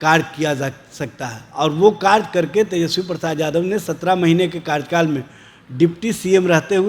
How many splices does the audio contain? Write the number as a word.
zero